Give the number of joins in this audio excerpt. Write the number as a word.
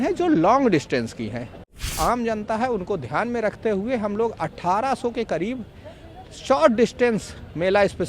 one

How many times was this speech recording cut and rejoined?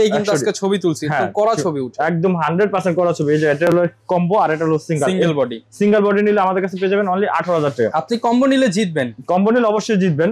zero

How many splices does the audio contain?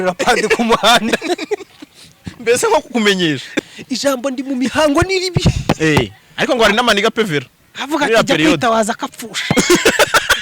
one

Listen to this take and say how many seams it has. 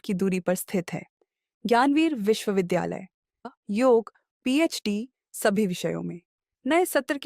one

